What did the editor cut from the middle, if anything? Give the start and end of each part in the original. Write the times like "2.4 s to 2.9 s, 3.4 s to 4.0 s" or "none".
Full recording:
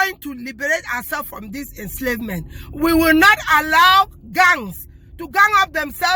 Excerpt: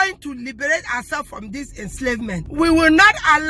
2.5 s to 2.7 s